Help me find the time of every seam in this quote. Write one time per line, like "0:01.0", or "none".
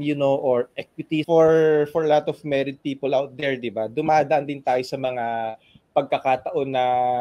0:01.2

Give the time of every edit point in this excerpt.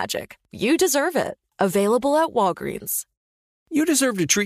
0:03.5

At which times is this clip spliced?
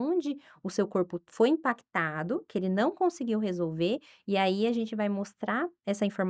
none

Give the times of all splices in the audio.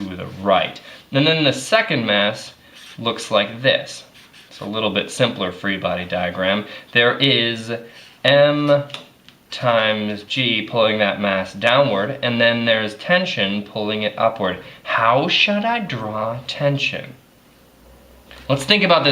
0:17.3

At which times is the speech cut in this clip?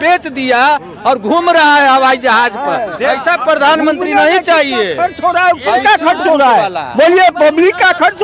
none

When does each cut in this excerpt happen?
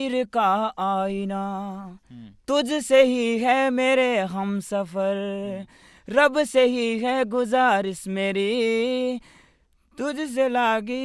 none

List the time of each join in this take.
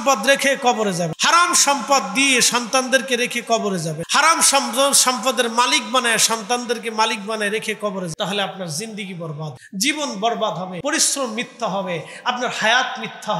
0:01.1
0:04.0
0:08.1
0:09.6
0:10.8

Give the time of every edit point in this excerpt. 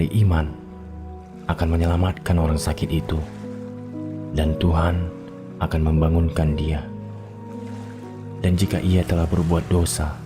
0:06.8
0:08.1

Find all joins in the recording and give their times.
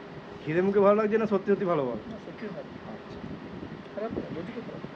none

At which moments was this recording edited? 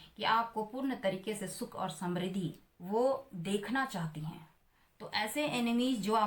0:02.7

